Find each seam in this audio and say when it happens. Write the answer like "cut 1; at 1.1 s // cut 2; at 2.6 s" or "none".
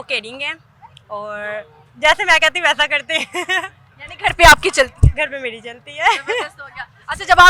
none